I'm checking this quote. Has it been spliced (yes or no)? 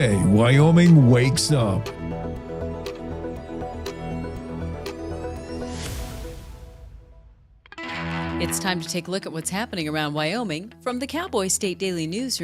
yes